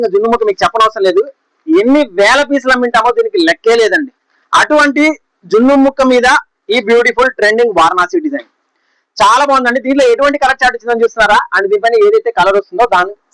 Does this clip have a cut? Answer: no; 0 cuts

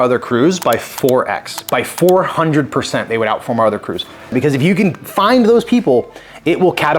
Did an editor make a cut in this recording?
yes; 2 cuts; at 4.3 s, 5.1 s

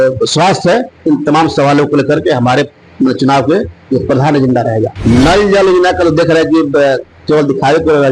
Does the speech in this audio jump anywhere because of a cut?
yes; 1 cut; at 4.9 s

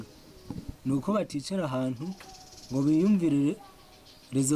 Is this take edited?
no; 0 cuts

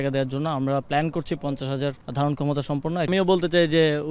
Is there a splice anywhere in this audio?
yes; 2 cuts; at 2.0 s, 3.1 s

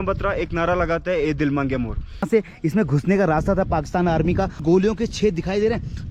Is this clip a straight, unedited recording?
no; 2 cuts; at 2.3 s, 4.6 s

